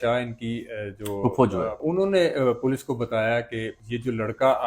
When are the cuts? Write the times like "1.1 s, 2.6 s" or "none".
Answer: 1.8 s